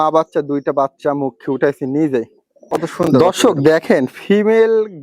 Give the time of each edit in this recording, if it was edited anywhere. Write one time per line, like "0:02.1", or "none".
0:03.1